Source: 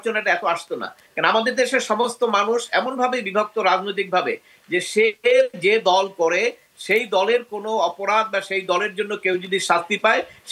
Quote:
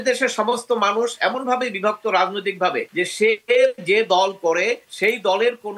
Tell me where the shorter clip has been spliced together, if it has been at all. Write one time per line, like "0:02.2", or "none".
0:02.9
0:04.9